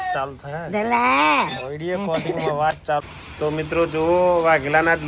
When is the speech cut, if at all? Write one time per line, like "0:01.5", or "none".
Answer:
0:03.0